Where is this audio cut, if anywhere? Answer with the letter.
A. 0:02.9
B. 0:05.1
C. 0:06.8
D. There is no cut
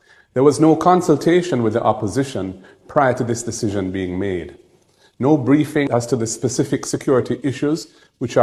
D